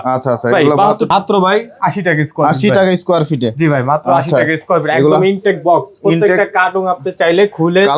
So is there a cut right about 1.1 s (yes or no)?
yes